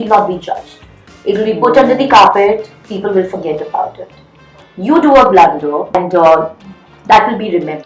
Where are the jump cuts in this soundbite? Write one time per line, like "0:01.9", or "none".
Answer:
0:06.0